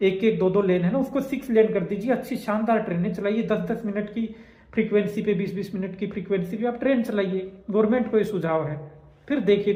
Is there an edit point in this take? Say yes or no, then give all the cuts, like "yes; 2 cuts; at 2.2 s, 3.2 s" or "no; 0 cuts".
no; 0 cuts